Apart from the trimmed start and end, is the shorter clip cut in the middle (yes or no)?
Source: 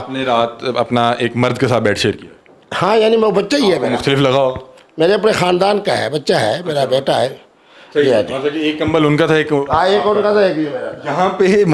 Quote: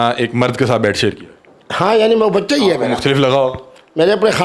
no